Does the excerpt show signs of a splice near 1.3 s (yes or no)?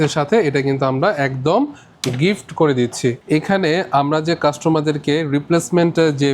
no